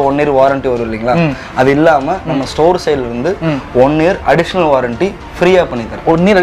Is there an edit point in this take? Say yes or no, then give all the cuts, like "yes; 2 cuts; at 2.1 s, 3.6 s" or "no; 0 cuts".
no; 0 cuts